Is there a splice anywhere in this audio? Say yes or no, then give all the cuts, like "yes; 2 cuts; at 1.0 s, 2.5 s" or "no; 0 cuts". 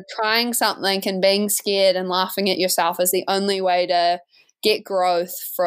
no; 0 cuts